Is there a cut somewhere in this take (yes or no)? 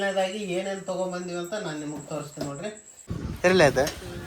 yes